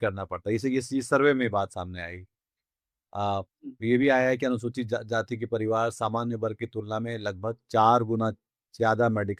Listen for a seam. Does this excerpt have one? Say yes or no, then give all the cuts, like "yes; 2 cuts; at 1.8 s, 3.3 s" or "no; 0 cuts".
no; 0 cuts